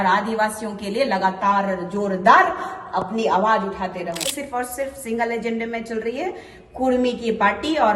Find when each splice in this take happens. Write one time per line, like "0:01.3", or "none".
0:04.3